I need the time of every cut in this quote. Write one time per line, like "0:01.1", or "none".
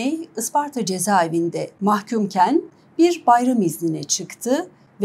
0:01.7